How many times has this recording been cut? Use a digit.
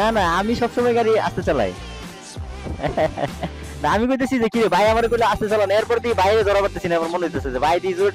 0